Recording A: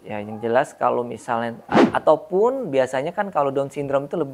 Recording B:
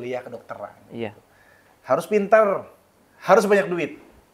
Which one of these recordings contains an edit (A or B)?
A